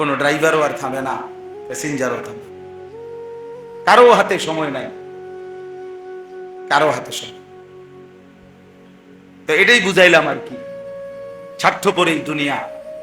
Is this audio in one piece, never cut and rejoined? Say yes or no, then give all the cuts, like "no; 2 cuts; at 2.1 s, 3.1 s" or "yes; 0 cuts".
no; 2 cuts; at 2.3 s, 3.8 s